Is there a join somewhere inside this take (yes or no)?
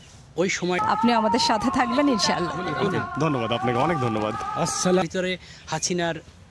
yes